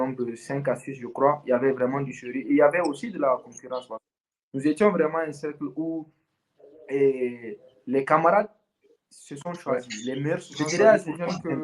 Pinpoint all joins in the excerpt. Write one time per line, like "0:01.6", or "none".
0:10.5